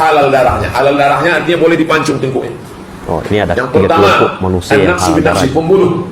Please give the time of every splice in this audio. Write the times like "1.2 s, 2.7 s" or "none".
none